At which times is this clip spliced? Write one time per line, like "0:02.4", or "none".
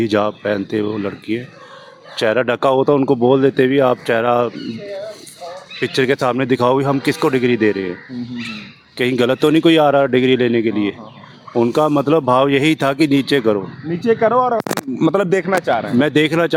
none